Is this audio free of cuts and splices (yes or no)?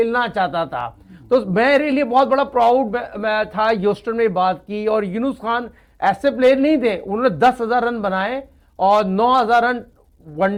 yes